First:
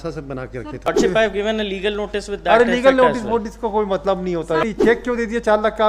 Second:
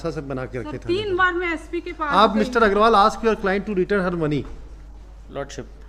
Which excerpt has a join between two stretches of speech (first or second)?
first